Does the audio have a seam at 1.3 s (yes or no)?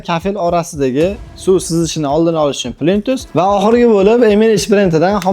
no